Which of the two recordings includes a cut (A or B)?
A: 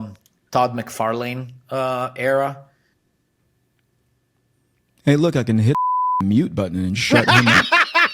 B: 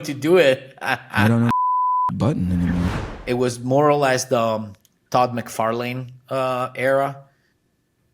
B